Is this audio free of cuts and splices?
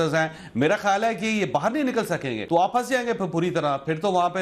no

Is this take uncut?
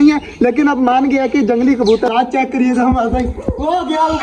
no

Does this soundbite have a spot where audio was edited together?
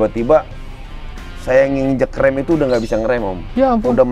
no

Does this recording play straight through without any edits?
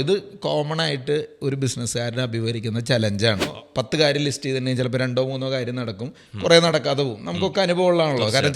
no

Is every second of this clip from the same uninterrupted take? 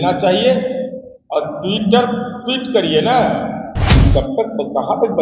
no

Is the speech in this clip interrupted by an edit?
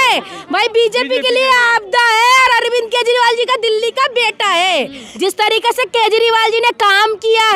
yes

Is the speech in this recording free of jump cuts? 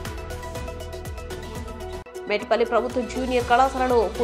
no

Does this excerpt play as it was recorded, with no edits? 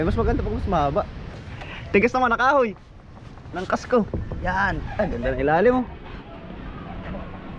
no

